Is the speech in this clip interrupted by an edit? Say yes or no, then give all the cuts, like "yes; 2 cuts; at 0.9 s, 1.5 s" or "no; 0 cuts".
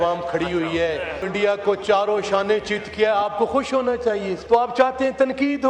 yes; 2 cuts; at 1.3 s, 4.4 s